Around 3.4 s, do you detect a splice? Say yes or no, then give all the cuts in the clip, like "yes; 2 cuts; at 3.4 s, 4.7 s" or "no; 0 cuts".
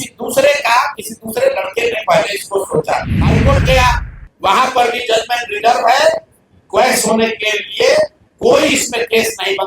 yes; 1 cut; at 3.4 s